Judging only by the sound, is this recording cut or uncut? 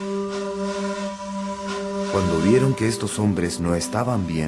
cut